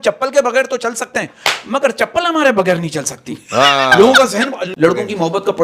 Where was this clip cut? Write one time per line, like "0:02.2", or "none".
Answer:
0:04.6